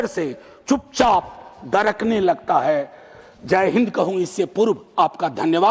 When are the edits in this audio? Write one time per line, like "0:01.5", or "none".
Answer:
none